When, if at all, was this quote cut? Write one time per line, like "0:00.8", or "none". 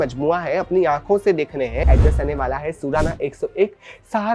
0:01.9